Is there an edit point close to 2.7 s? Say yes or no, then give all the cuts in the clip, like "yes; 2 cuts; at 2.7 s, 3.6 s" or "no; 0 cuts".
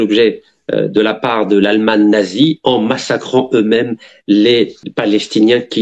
no; 1 cut; at 4.8 s